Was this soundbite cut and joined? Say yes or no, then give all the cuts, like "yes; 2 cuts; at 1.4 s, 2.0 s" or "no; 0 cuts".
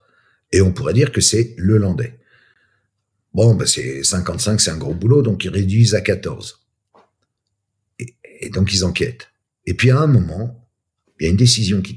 no; 0 cuts